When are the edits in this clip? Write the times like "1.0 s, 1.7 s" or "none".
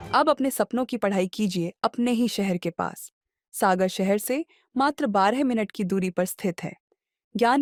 none

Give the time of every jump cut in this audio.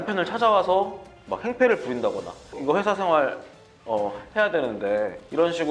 2.5 s

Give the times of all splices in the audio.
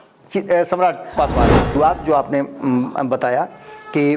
1.7 s

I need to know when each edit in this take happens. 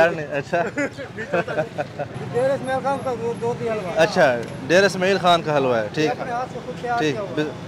none

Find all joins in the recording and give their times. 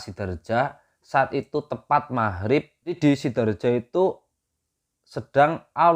3.0 s

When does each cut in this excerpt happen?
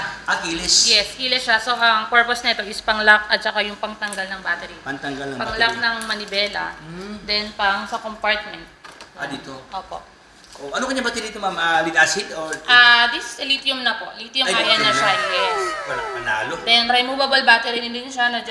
none

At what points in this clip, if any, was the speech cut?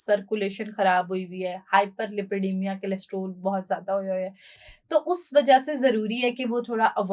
none

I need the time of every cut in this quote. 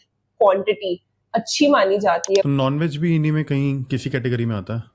2.4 s

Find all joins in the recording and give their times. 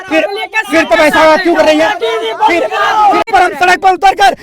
3.3 s

